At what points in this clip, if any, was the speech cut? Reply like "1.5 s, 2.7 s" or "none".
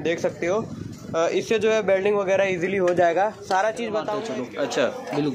4.2 s